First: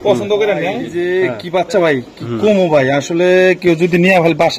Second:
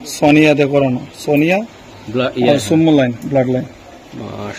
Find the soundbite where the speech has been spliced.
first; 1 cut; at 0.9 s

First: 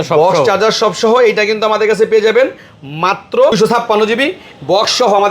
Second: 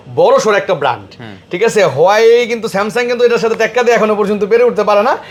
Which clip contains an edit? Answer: first; 1 cut; at 3.5 s

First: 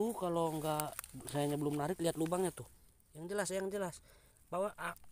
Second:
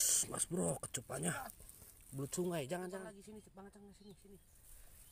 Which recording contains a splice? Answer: second; 1 cut; at 3.0 s

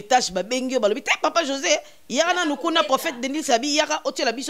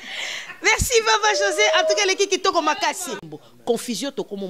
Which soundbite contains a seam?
second; 1 cut; at 3.2 s

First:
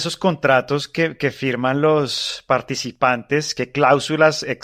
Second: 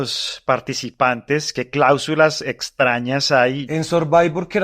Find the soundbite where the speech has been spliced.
second; 1 cut; at 3.6 s

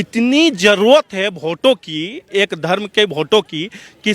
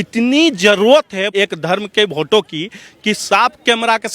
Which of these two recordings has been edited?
second; 1 cut; at 1.3 s

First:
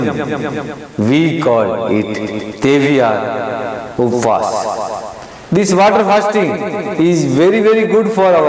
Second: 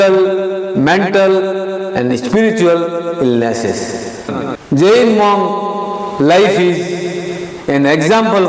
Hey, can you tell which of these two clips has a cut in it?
second; 1 cut; at 4.3 s

